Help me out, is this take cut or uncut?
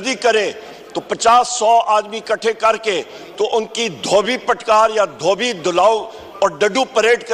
uncut